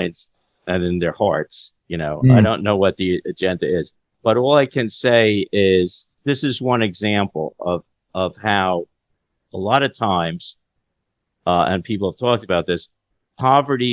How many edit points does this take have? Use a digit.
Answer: 2